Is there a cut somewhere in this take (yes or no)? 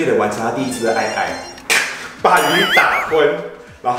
yes